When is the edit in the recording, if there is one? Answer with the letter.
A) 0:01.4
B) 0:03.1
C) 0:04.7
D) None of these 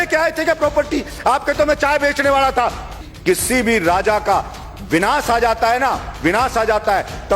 B